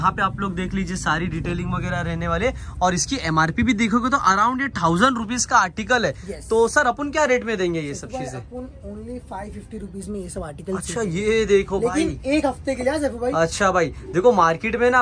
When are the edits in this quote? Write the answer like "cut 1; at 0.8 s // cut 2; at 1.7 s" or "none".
none